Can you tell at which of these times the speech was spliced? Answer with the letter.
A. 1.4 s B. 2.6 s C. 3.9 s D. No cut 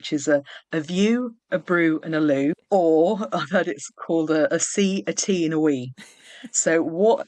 B